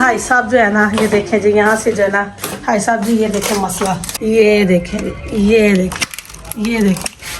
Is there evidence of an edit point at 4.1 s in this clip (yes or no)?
yes